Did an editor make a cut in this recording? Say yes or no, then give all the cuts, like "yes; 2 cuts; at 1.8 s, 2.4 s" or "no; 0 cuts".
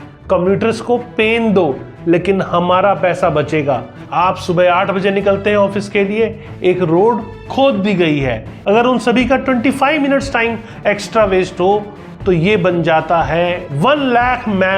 yes; 2 cuts; at 4.0 s, 8.5 s